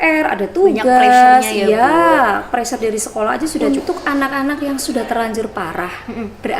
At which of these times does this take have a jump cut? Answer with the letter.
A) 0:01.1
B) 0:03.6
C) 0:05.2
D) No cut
B